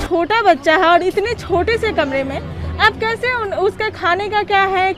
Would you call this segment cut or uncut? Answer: uncut